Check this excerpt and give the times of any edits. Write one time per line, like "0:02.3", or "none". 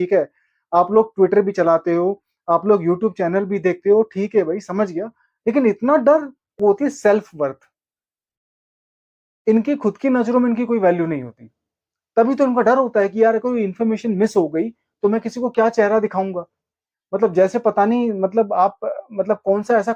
0:06.4